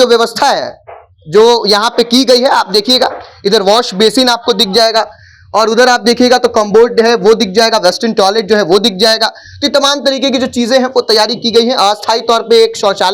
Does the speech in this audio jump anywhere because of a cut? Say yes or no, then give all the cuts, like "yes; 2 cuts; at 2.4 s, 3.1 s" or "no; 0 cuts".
no; 0 cuts